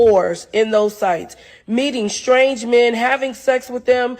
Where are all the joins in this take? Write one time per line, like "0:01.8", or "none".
0:01.8

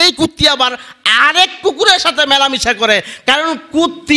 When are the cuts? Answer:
none

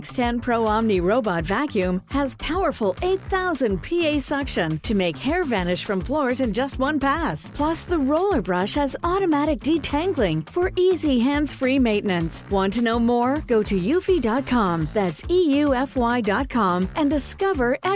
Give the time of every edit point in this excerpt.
none

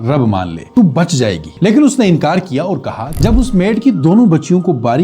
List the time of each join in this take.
0:03.1

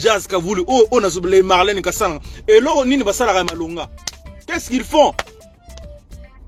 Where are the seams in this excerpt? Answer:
none

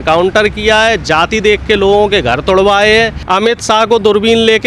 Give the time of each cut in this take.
0:03.2

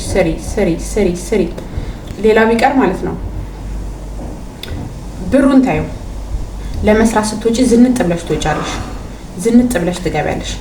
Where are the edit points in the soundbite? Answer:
none

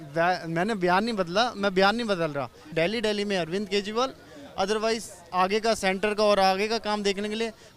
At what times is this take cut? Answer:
0:02.7

